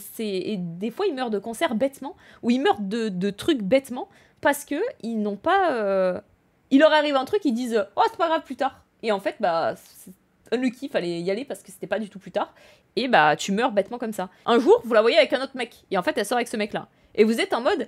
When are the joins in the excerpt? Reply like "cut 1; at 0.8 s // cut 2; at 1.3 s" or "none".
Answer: cut 1; at 14.3 s